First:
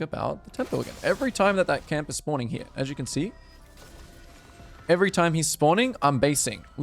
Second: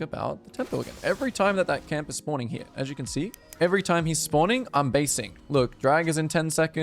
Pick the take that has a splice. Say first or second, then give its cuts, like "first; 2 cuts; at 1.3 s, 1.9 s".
second; 1 cut; at 3.4 s